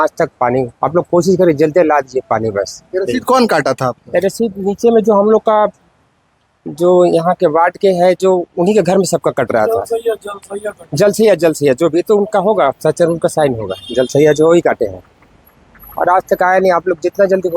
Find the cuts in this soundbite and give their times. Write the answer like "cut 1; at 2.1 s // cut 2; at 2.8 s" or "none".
none